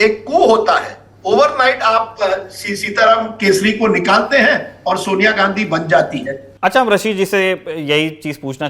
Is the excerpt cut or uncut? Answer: uncut